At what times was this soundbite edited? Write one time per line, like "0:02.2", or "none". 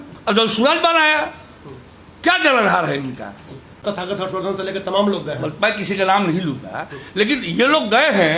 0:03.8